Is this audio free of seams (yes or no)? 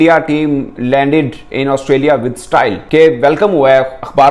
yes